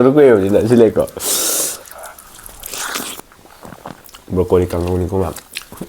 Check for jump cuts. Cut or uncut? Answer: cut